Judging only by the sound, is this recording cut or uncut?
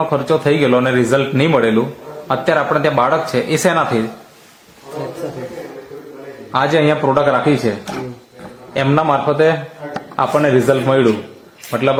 uncut